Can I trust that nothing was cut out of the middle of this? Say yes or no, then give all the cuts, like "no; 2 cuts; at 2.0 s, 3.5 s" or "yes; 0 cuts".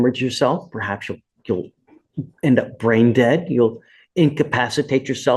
yes; 0 cuts